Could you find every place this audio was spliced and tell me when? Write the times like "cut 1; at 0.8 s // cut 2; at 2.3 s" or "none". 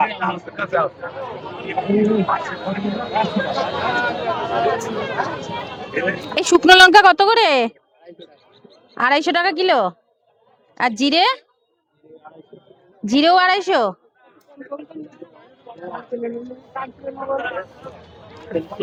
none